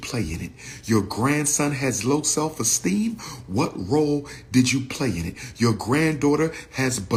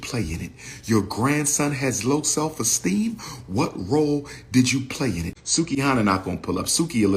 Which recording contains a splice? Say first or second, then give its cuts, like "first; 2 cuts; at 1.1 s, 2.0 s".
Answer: second; 1 cut; at 5.3 s